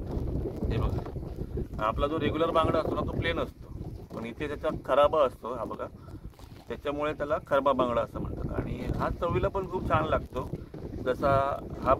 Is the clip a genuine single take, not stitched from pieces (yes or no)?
yes